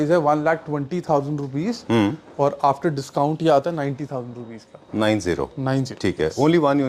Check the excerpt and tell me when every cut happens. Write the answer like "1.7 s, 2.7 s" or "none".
none